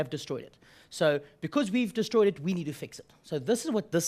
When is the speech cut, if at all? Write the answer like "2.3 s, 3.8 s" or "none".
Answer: 1.1 s

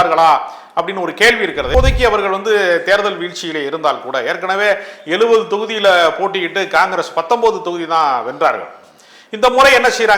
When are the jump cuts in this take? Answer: 1.7 s

